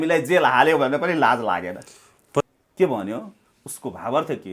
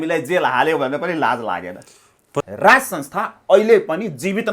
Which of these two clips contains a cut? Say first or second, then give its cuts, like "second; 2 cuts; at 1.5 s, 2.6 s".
second; 1 cut; at 2.5 s